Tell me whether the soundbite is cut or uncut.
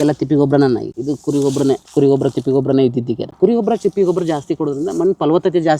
cut